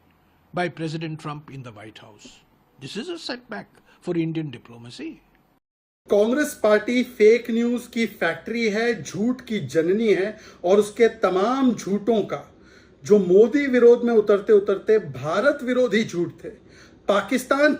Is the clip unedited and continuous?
no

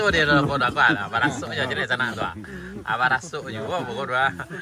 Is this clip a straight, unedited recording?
yes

